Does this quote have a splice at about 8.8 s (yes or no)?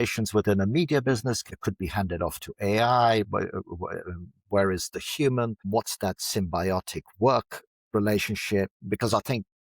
yes